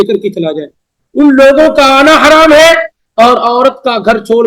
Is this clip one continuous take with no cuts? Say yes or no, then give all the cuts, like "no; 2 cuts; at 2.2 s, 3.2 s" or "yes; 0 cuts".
yes; 0 cuts